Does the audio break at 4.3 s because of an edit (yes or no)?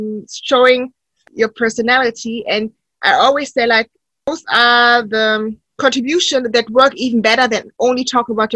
yes